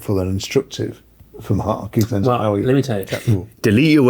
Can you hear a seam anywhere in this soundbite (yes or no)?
no